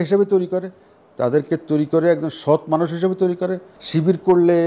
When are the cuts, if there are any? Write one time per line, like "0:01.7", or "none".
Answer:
0:03.7